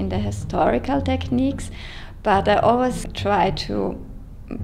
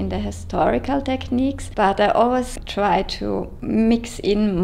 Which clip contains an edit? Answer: second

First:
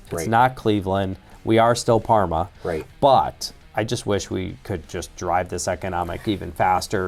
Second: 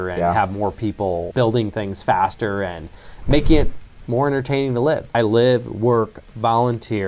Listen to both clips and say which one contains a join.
second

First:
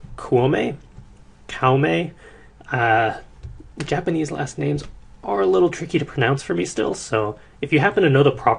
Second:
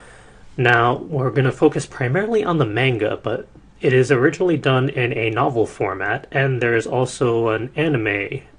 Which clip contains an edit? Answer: first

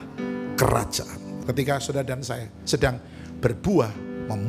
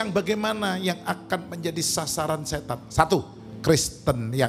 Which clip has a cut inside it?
first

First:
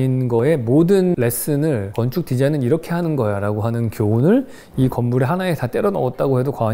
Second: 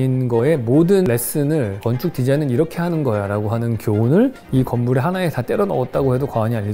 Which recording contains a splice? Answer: second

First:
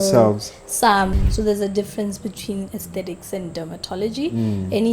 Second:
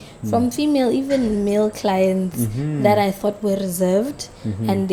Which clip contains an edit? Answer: first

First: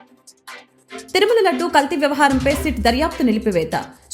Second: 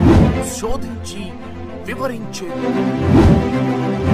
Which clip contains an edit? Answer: first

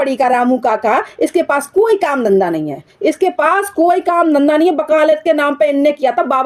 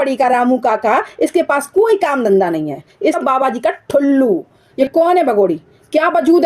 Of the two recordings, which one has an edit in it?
second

